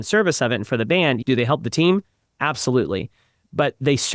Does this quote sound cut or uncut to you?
cut